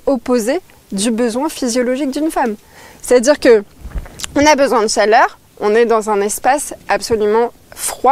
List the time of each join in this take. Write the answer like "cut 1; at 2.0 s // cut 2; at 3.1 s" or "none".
none